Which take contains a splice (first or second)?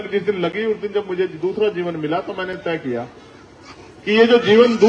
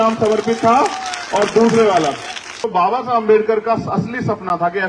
second